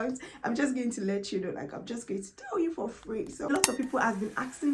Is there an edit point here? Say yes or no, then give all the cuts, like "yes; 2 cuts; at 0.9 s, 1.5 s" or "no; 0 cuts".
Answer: yes; 1 cut; at 3.5 s